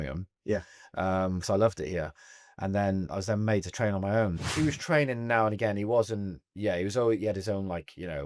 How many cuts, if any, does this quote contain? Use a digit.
1